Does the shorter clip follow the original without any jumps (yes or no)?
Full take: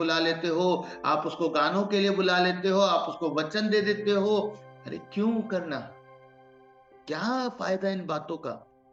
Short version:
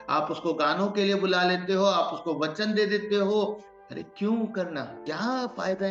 no